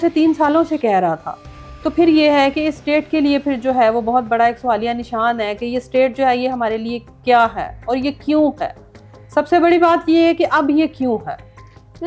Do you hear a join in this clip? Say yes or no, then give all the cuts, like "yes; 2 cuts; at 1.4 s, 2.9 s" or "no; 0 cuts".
no; 0 cuts